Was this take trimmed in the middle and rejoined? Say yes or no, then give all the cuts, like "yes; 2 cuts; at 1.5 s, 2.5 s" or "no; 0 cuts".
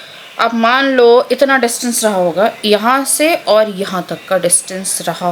no; 0 cuts